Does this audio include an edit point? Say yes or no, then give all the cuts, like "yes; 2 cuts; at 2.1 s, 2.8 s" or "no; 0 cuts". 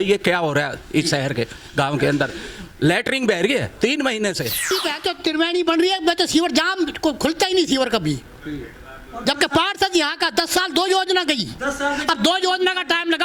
yes; 1 cut; at 4.6 s